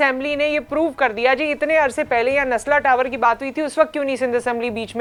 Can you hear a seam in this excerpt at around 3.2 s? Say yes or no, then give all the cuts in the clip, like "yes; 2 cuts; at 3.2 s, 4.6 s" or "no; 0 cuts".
no; 0 cuts